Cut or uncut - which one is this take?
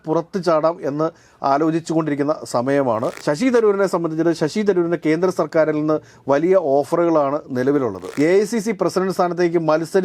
cut